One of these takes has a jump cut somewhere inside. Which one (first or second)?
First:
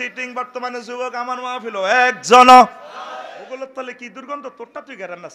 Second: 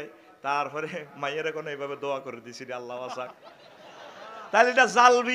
first